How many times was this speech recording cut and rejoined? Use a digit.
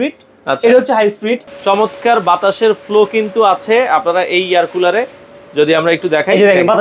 1